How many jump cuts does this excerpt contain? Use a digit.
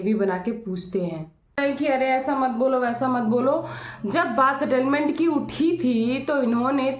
1